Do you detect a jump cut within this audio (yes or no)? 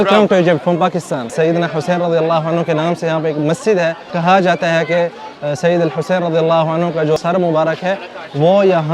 yes